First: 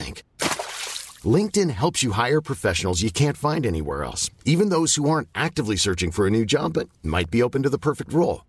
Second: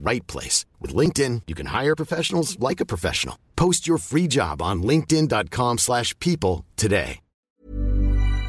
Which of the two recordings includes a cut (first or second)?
second